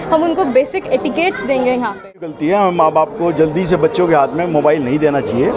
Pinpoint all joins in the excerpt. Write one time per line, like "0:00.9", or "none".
0:02.5